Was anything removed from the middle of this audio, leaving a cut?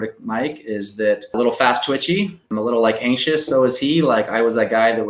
yes; 1 cut; at 1.3 s

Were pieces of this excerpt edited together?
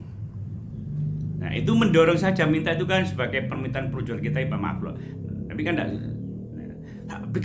no; 0 cuts

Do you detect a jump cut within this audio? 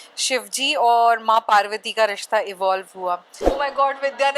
yes; 1 cut; at 3.4 s

